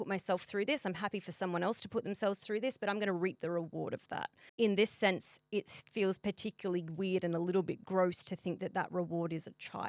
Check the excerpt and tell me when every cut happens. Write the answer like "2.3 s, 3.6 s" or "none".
none